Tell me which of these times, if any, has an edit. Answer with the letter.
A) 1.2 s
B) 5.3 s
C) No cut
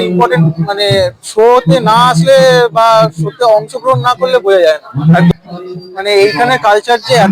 B